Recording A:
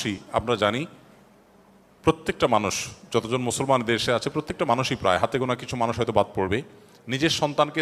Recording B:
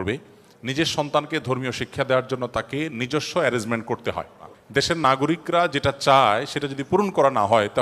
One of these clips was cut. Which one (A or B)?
B